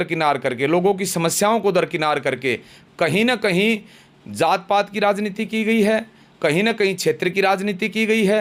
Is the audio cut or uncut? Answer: uncut